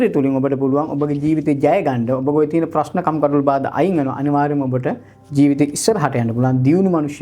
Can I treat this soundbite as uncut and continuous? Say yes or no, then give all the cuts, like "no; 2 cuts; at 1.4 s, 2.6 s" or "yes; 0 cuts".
yes; 0 cuts